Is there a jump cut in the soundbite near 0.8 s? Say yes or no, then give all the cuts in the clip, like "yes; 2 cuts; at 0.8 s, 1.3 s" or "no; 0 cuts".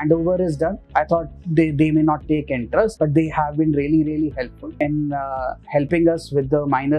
yes; 3 cuts; at 0.8 s, 2.9 s, 4.6 s